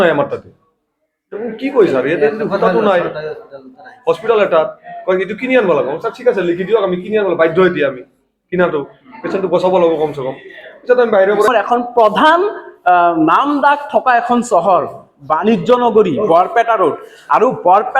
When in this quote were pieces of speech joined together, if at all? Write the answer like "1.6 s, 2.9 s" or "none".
11.5 s